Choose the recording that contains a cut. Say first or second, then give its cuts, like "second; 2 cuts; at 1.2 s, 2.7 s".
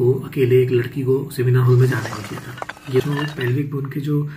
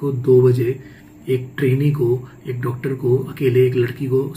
first; 1 cut; at 3.0 s